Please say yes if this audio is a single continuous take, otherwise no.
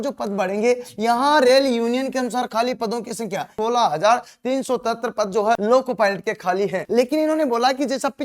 no